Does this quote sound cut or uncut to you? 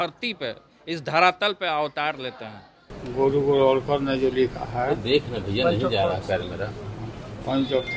cut